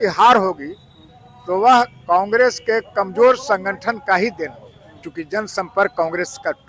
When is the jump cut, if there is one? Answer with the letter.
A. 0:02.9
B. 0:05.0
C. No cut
B